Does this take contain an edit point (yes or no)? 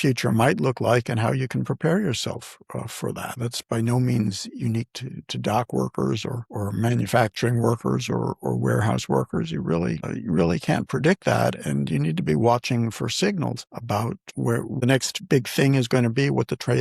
yes